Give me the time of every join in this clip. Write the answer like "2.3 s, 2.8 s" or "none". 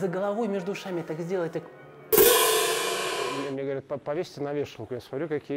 3.4 s